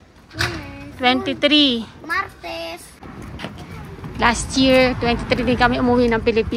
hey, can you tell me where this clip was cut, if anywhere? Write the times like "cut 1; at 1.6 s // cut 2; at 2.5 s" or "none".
cut 1; at 3.0 s